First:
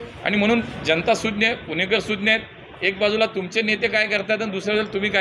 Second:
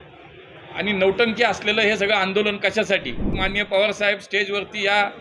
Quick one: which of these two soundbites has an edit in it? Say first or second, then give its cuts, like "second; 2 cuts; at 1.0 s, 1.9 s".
second; 1 cut; at 3.3 s